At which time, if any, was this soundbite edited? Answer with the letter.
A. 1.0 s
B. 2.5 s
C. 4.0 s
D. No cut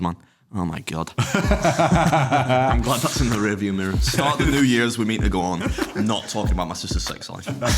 C